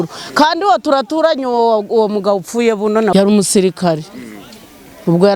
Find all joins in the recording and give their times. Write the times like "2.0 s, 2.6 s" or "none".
3.1 s